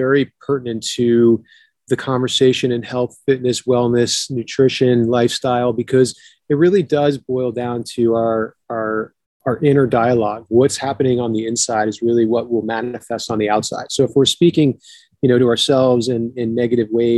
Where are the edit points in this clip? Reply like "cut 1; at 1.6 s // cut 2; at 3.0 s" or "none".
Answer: none